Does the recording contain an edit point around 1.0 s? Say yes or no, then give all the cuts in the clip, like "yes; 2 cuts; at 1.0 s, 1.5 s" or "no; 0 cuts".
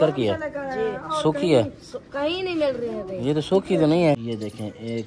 no; 1 cut; at 4.2 s